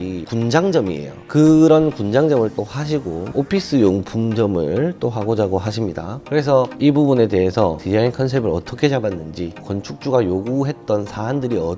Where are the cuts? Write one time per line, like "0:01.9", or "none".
0:01.2